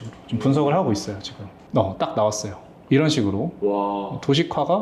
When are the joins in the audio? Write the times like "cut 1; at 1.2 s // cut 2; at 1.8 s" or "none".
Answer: none